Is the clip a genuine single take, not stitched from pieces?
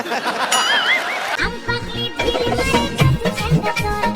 no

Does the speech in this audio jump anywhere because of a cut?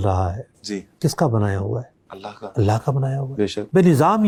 no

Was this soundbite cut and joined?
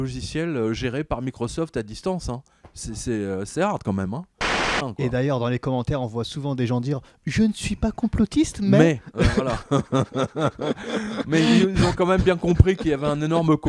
yes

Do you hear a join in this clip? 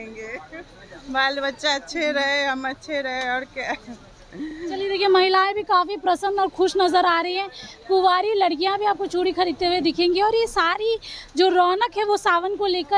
no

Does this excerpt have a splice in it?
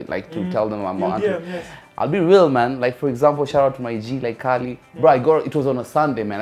no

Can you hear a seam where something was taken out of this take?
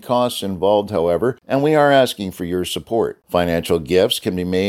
yes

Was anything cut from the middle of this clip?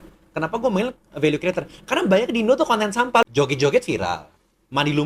yes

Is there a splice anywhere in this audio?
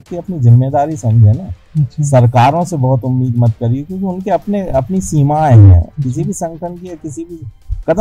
no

